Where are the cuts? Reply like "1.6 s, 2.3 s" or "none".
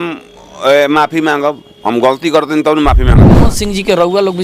3.4 s